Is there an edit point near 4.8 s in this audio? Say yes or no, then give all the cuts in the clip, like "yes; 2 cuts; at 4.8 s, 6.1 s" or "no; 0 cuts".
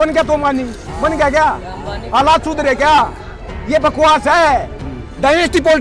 yes; 1 cut; at 4.8 s